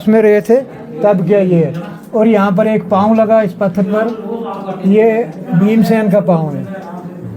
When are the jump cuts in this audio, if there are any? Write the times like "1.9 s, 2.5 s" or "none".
none